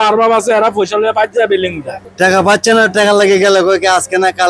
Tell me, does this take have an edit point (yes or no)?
yes